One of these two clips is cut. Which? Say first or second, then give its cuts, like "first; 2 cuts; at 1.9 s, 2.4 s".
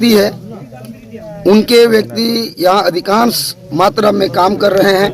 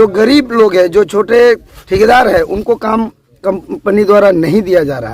second; 1 cut; at 1.7 s